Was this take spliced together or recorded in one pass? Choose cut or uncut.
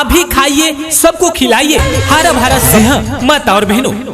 cut